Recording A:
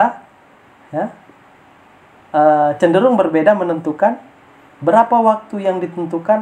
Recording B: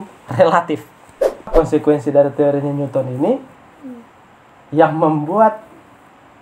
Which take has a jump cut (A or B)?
B